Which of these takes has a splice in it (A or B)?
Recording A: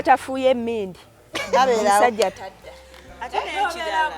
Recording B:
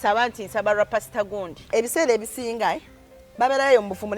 B